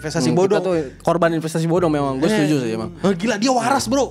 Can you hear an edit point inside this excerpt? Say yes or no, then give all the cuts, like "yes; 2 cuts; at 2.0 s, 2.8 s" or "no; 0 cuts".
no; 0 cuts